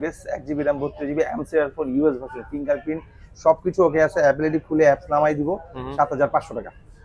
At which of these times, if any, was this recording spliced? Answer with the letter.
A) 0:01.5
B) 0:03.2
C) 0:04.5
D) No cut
D